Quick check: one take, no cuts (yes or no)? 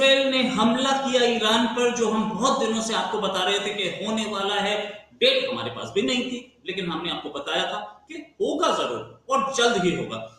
yes